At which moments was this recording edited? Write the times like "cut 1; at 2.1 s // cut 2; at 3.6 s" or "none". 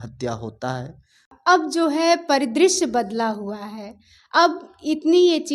cut 1; at 1.3 s